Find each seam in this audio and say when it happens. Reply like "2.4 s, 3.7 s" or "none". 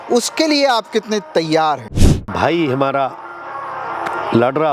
2.3 s